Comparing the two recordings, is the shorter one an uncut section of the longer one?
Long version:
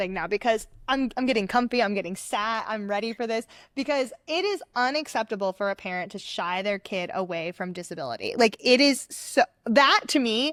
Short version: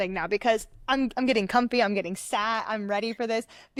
yes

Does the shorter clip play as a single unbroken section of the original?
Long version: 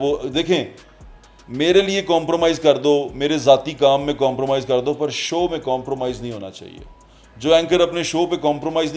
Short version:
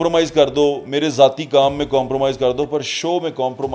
yes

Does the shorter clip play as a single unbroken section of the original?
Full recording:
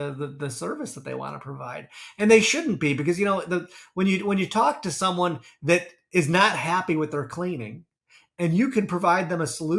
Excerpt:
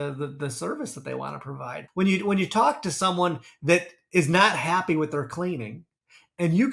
no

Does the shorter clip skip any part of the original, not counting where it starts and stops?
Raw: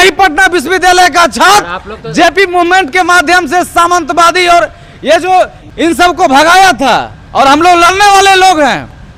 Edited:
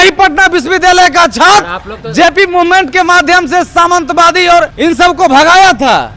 yes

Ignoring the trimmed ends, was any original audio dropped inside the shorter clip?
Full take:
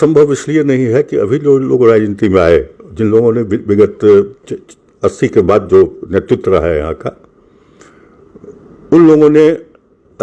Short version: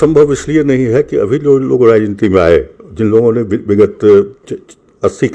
no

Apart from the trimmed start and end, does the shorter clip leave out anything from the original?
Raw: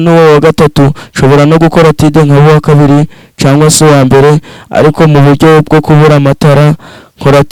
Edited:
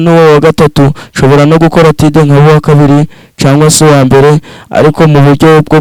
no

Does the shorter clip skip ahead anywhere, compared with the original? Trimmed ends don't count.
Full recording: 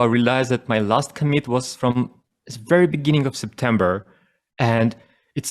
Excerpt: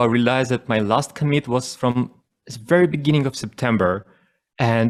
no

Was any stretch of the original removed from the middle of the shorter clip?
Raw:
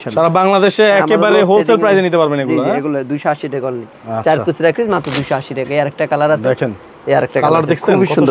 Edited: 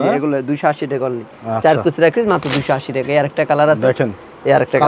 no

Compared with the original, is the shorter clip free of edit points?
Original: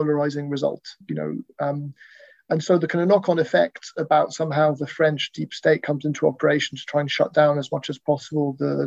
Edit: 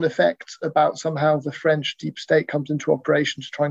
yes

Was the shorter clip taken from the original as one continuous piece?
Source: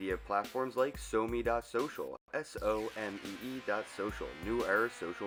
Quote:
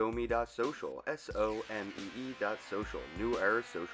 no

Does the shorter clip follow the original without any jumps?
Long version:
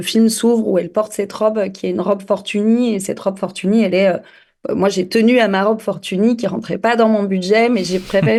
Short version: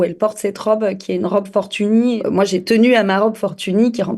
no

